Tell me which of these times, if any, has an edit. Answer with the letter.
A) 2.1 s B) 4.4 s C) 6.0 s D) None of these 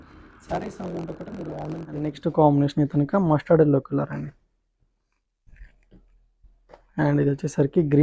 A